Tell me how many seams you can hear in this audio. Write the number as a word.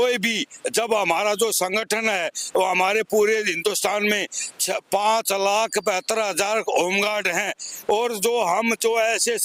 zero